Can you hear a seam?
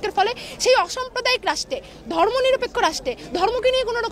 no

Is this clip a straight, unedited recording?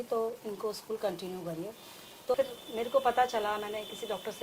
no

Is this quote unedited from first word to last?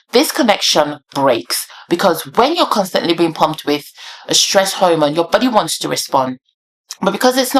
yes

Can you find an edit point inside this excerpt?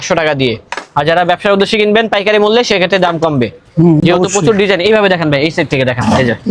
no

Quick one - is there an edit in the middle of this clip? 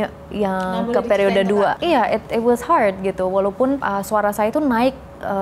yes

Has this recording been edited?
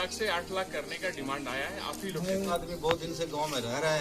yes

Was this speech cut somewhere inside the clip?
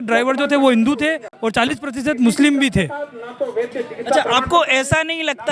no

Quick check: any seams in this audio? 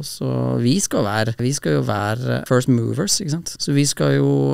yes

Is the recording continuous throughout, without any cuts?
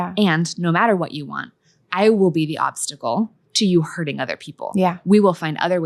yes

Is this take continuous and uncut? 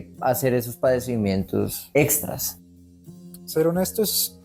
no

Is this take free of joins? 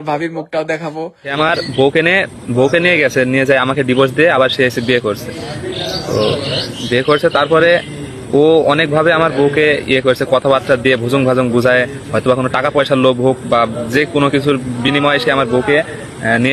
no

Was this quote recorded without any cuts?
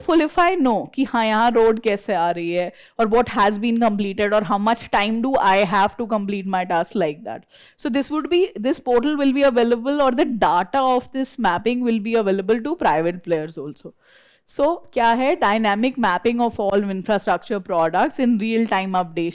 yes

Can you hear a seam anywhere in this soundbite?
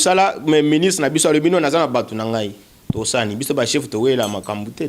no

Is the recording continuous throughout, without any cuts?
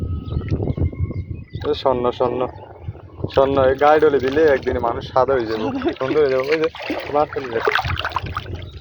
yes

